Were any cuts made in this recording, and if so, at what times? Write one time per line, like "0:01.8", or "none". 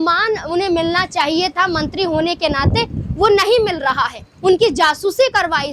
none